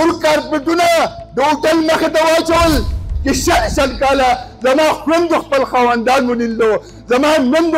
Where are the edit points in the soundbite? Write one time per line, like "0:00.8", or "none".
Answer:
0:03.1